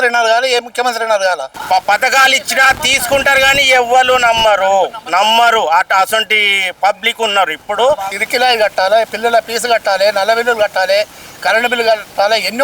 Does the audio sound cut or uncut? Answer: cut